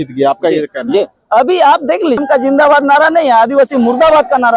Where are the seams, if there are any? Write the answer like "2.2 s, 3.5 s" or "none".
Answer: 2.2 s